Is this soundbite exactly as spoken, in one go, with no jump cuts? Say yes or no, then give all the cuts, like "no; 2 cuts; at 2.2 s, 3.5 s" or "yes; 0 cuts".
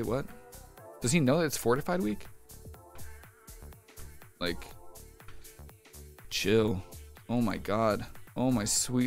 no; 1 cut; at 8.2 s